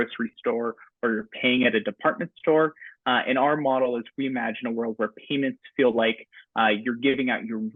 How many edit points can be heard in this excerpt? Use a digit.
0